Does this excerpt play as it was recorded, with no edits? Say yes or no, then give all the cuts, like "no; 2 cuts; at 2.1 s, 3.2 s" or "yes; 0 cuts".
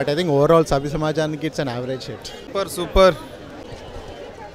yes; 0 cuts